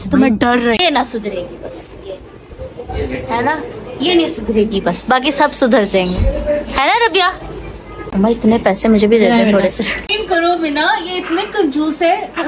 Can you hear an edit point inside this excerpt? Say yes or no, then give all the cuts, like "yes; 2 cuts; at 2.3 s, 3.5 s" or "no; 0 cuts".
yes; 3 cuts; at 0.8 s, 8.1 s, 10.1 s